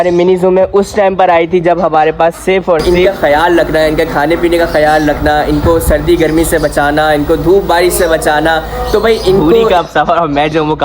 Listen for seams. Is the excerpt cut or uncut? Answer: cut